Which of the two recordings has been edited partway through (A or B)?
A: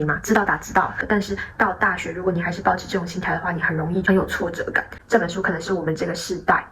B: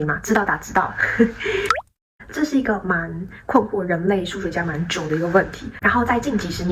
A